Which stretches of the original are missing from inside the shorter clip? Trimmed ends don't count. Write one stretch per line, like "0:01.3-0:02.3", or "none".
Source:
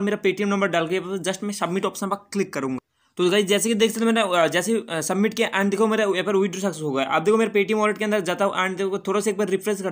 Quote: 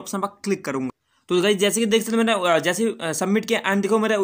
none